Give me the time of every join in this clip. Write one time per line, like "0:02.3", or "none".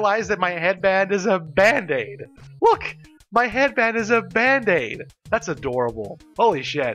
none